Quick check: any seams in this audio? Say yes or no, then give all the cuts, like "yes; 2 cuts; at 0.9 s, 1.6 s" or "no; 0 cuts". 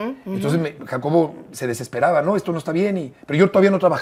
no; 0 cuts